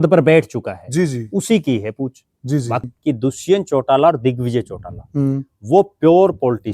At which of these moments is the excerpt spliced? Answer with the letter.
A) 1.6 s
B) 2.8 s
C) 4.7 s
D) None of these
B